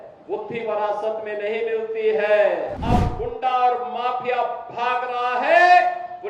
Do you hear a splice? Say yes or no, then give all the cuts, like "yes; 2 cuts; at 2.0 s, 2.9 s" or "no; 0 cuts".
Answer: yes; 1 cut; at 2.8 s